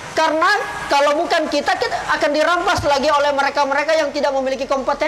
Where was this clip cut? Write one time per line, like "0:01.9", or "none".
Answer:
none